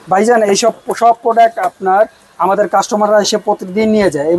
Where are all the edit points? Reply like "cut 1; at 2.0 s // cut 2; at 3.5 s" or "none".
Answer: none